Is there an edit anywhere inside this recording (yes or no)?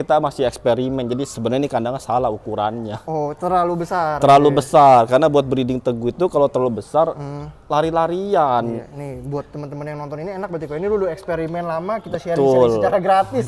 no